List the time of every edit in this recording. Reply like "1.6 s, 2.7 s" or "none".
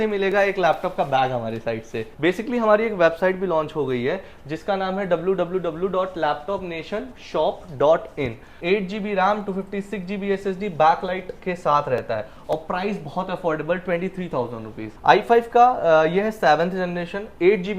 2.0 s, 8.5 s, 14.9 s